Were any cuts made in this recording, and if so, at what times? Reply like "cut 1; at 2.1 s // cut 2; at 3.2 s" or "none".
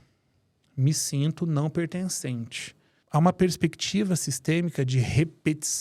cut 1; at 3.0 s